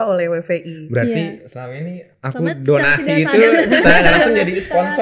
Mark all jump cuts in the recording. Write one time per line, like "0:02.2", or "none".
none